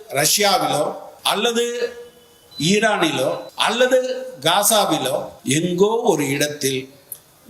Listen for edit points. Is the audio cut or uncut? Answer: cut